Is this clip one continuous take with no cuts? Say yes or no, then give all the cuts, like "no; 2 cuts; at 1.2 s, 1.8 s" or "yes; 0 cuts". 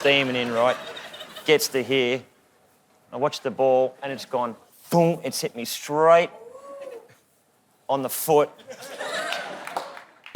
yes; 0 cuts